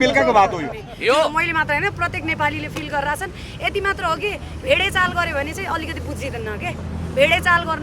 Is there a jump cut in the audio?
yes; 1 cut; at 1.3 s

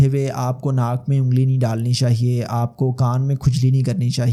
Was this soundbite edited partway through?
no; 0 cuts

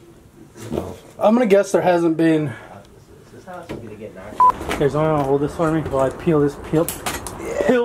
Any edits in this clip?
yes; 1 cut; at 4.5 s

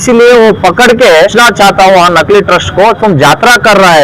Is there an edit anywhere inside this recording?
yes; 1 cut; at 1.3 s

